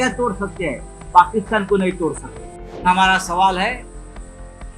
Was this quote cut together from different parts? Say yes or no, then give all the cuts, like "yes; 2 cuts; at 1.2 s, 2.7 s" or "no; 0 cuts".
yes; 1 cut; at 2.8 s